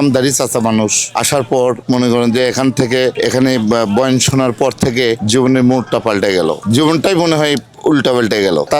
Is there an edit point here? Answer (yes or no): no